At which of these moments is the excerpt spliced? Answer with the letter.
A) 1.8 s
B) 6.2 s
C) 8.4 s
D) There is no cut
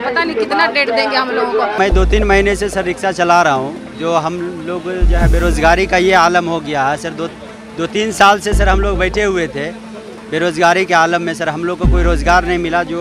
A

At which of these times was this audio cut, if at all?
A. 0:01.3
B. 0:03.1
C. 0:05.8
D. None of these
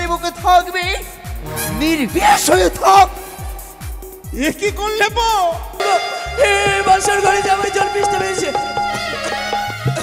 C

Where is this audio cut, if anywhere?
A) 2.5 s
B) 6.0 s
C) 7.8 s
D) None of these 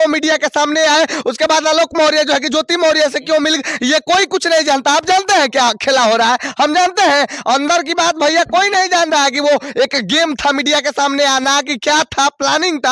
D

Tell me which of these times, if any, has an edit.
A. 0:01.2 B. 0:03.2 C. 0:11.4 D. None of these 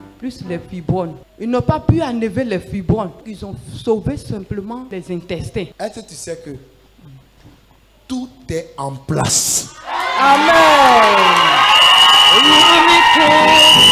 A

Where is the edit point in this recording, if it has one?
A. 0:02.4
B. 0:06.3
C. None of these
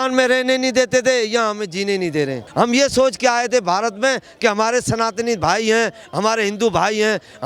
A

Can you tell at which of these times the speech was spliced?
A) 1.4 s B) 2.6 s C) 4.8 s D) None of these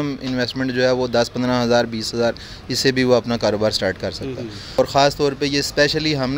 C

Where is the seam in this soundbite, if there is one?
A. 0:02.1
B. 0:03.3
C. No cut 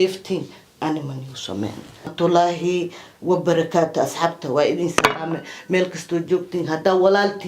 A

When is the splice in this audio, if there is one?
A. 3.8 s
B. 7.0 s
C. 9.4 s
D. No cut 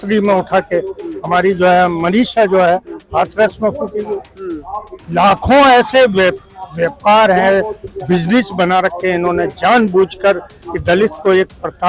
D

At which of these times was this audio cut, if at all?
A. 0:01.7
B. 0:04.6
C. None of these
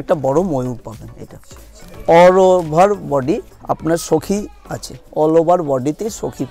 A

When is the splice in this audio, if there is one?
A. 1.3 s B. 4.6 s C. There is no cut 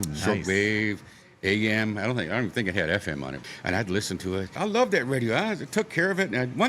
B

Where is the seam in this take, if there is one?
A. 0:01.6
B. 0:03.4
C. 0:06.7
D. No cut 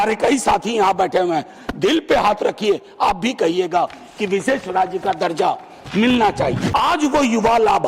C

